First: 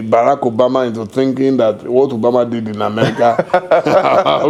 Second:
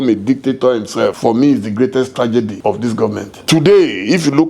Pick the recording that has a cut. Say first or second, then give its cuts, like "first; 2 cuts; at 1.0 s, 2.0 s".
second; 2 cuts; at 1.2 s, 3.0 s